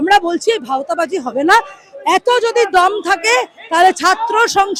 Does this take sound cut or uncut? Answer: uncut